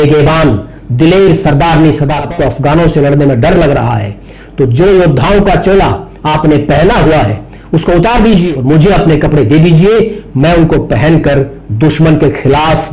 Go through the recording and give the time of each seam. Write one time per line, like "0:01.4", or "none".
0:02.2
0:08.5